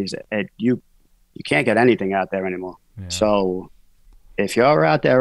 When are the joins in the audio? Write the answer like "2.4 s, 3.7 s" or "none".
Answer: none